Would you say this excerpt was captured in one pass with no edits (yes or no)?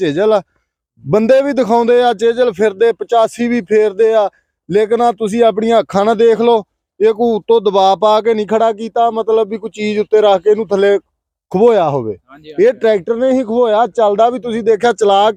yes